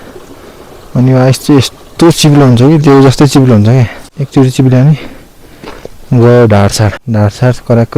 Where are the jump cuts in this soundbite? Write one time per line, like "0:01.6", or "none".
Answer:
0:04.1
0:06.9